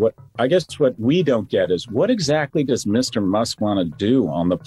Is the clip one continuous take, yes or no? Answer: yes